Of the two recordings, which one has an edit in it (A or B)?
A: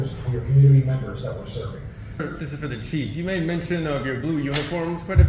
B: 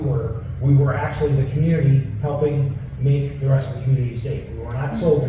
A